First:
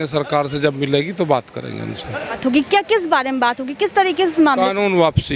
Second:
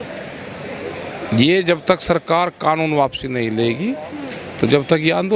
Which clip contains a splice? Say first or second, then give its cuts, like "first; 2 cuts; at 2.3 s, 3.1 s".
first; 1 cut; at 2.4 s